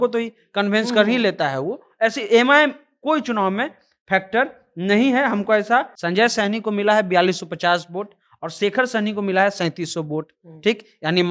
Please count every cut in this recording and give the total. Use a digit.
1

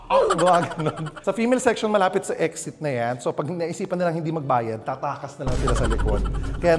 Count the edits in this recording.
1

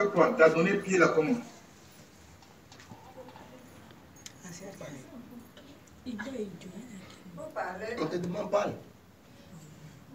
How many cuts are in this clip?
0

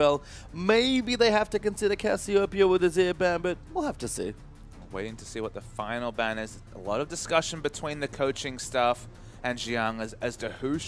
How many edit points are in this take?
1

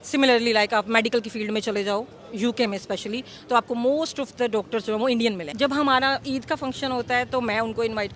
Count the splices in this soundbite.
1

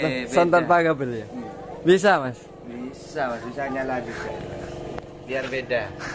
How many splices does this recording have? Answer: 0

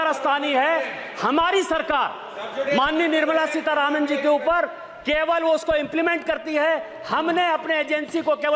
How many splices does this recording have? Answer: 0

